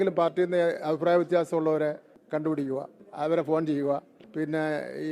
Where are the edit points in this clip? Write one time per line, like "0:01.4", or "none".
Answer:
0:02.1
0:03.0
0:04.2